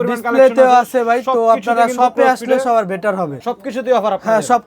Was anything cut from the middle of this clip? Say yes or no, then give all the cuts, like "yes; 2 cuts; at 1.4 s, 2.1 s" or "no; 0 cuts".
yes; 1 cut; at 3.4 s